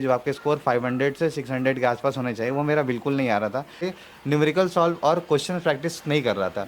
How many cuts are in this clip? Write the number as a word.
one